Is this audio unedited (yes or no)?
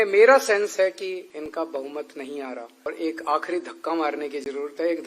no